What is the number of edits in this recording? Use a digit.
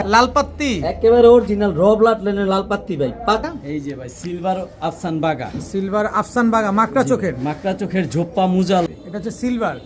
2